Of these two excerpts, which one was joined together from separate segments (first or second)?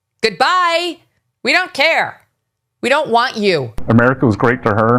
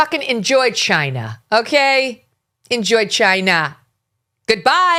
first